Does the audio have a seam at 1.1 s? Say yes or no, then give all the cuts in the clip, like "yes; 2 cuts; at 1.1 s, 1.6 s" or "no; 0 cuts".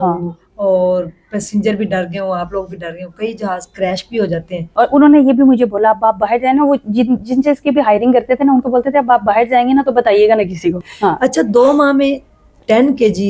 no; 2 cuts; at 4.6 s, 10.8 s